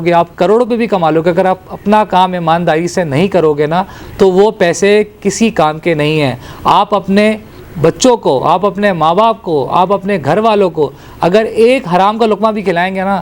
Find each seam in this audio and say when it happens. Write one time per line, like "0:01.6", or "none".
none